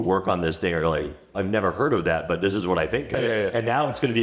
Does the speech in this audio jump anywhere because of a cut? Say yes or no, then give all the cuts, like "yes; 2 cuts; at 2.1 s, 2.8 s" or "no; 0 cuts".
yes; 2 cuts; at 1.2 s, 3.1 s